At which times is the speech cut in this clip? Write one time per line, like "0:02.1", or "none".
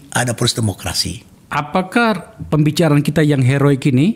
0:01.4

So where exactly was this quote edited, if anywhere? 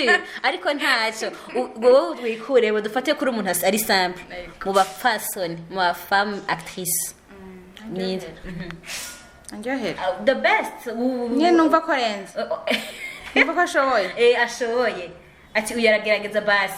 none

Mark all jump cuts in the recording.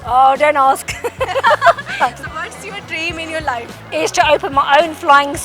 0:02.3
0:03.8

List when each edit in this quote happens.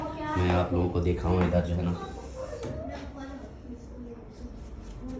none

